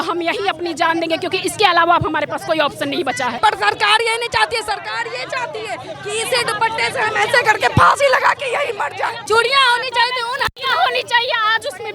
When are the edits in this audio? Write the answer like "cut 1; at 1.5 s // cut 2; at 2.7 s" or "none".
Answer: cut 1; at 3.4 s // cut 2; at 9.2 s